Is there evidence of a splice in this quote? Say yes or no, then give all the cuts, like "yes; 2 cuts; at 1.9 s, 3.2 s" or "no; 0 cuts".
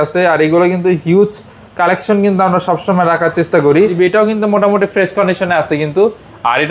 yes; 1 cut; at 3.9 s